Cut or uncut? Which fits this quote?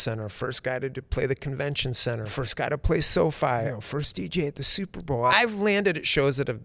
cut